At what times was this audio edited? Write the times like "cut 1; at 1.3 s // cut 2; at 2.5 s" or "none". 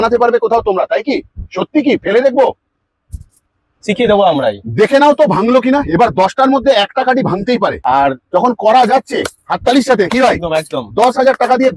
cut 1; at 7.8 s